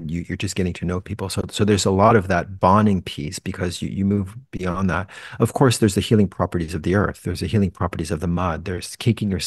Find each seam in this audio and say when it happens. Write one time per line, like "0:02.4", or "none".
none